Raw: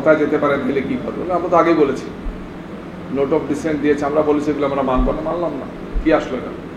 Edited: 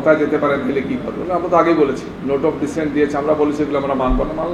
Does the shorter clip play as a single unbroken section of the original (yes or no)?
no